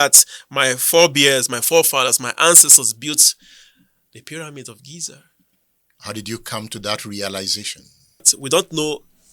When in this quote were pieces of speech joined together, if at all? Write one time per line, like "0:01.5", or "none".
0:08.3